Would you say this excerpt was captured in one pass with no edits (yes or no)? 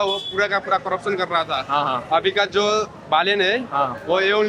yes